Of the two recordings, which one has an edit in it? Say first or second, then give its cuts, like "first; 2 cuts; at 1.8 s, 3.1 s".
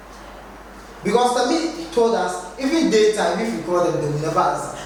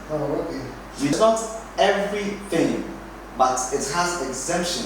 second; 1 cut; at 1.1 s